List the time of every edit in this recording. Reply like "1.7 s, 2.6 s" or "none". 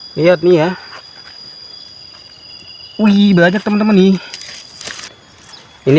5.0 s